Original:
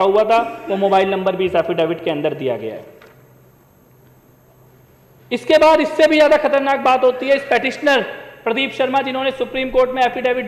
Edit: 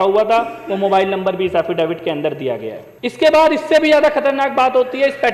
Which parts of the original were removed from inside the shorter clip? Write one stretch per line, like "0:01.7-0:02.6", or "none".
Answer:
0:02.9-0:05.1